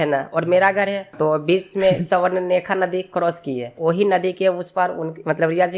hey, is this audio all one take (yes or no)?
no